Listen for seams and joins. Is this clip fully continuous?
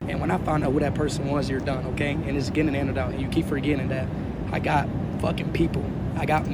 yes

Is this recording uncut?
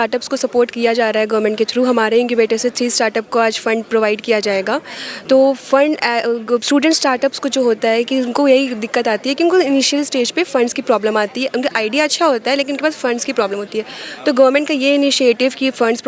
yes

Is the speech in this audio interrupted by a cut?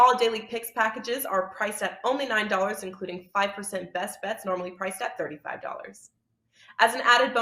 no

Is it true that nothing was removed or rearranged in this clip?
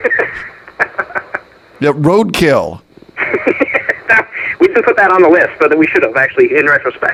yes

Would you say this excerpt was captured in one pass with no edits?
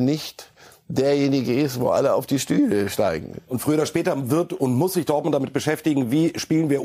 yes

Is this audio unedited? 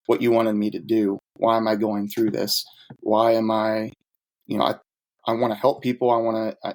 yes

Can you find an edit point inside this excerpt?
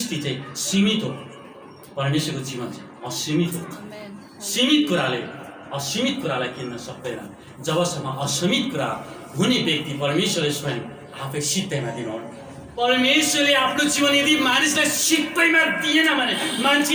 yes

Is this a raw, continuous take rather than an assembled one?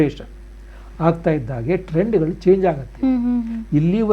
yes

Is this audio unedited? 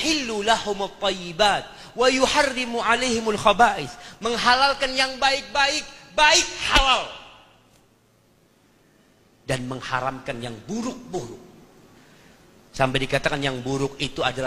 yes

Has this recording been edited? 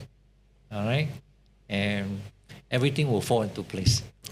no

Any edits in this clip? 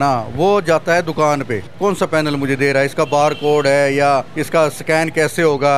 yes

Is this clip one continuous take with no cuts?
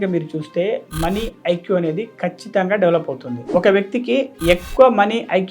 no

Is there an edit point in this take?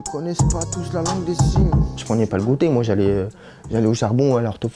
yes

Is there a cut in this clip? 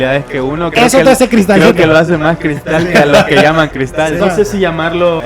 yes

